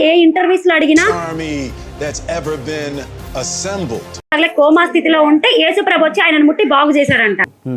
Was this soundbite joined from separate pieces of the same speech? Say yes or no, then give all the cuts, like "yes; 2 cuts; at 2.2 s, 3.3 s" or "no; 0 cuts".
yes; 2 cuts; at 1.1 s, 4.3 s